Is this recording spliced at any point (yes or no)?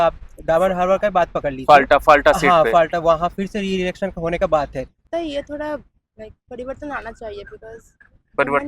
yes